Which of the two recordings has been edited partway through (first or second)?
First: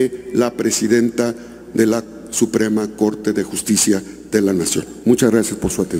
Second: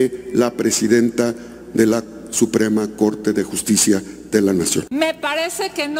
second